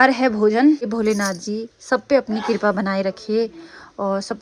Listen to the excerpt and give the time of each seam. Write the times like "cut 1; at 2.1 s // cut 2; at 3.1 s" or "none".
cut 1; at 0.9 s